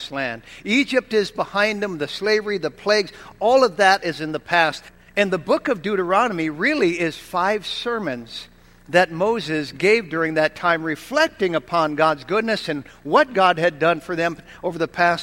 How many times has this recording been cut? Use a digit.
1